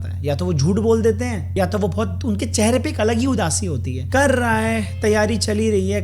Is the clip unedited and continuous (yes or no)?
no